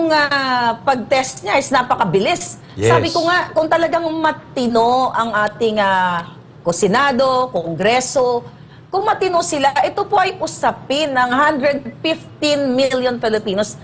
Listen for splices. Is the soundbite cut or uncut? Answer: uncut